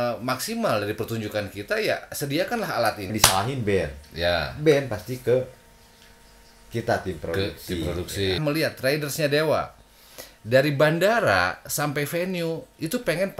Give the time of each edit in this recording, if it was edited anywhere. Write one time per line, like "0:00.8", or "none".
0:03.1
0:08.4